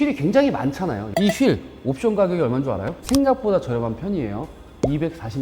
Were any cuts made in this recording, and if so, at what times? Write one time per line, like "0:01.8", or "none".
0:01.0
0:02.9